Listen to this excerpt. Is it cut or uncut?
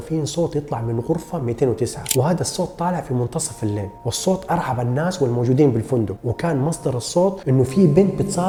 uncut